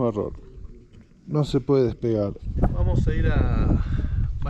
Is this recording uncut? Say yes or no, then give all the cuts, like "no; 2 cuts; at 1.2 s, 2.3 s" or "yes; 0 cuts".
yes; 0 cuts